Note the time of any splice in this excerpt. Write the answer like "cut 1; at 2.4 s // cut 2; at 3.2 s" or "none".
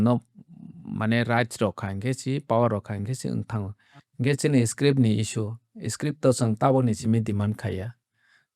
cut 1; at 3.7 s